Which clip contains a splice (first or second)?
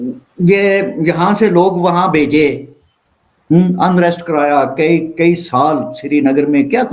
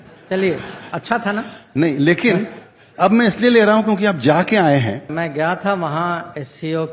second